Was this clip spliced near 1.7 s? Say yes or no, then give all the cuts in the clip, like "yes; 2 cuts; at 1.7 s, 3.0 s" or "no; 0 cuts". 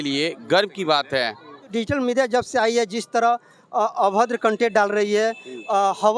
yes; 1 cut; at 1.7 s